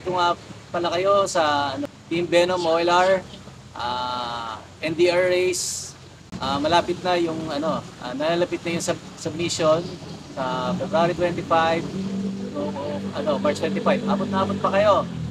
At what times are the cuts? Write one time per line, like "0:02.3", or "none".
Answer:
0:01.9